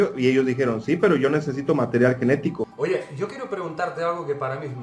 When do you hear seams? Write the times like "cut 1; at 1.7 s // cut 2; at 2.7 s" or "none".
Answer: cut 1; at 2.7 s